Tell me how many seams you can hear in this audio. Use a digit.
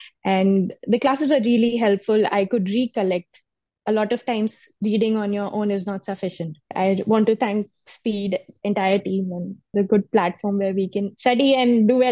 3